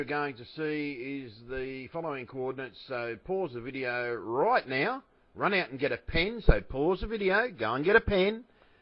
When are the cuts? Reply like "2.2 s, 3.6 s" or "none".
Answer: 5.3 s